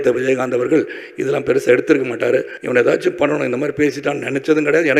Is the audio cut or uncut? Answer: cut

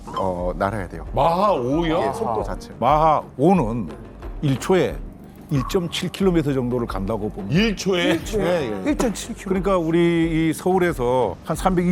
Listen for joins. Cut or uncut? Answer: cut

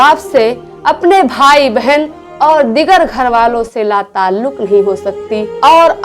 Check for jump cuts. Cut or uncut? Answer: uncut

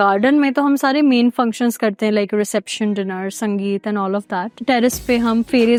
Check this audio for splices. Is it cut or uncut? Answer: uncut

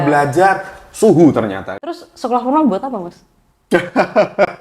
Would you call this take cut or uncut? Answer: cut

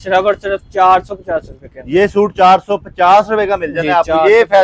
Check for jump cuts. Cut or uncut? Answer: uncut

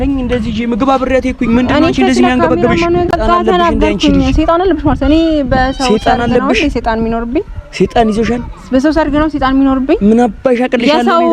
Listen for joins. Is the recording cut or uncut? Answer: cut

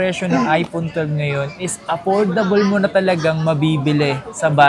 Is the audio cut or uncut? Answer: uncut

